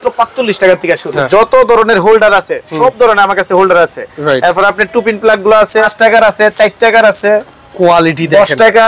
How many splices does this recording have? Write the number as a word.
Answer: two